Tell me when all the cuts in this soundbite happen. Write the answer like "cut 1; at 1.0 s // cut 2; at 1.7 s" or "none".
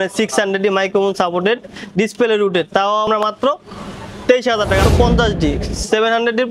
cut 1; at 3.1 s // cut 2; at 4.9 s